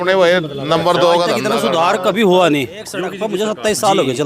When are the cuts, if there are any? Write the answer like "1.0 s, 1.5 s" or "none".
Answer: 1.4 s, 3.1 s